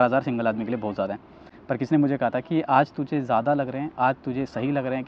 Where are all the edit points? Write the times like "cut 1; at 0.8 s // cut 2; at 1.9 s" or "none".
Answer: none